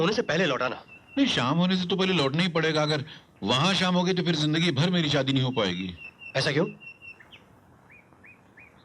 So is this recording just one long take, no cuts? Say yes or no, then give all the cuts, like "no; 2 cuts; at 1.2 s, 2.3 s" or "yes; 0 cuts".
yes; 0 cuts